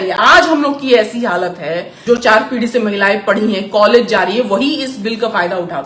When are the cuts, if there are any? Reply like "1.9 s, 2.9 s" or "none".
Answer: 1.9 s